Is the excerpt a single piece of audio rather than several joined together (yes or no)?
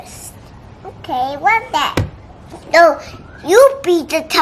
yes